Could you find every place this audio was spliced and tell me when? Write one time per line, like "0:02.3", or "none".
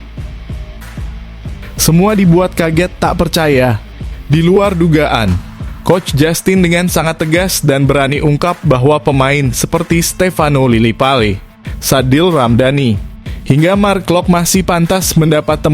0:01.8

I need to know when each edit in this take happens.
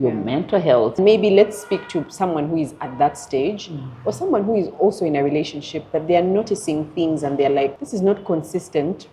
0:01.0
0:07.8

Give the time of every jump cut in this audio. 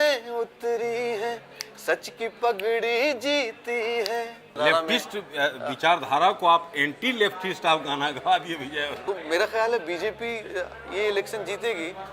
0:04.6
0:08.9

